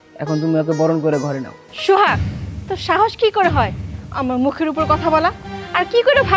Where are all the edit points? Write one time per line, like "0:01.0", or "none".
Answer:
none